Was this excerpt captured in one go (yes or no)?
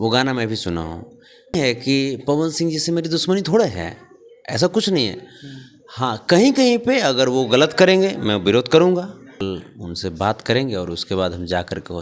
no